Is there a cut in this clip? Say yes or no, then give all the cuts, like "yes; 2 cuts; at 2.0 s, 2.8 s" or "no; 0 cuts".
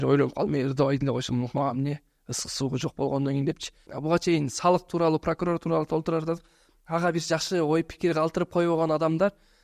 yes; 1 cut; at 3.8 s